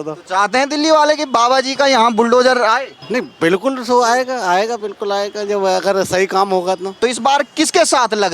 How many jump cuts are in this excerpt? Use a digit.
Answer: 2